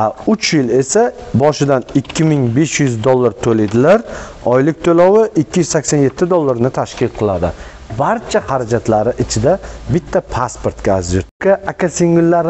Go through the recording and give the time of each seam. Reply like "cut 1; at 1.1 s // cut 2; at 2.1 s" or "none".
cut 1; at 11.3 s